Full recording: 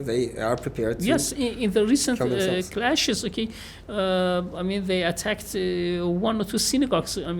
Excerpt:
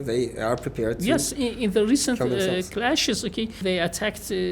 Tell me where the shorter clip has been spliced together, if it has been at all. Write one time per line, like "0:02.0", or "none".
0:03.6